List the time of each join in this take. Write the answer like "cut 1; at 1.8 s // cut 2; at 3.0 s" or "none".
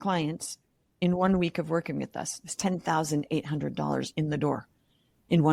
none